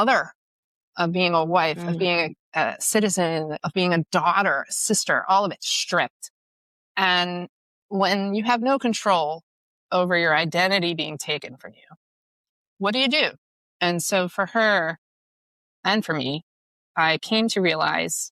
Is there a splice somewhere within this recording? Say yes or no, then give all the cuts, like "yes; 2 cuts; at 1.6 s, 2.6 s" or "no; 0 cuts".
yes; 1 cut; at 3.6 s